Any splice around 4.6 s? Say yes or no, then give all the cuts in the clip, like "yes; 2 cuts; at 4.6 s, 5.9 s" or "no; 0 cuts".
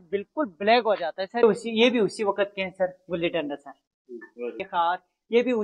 yes; 2 cuts; at 1.4 s, 4.6 s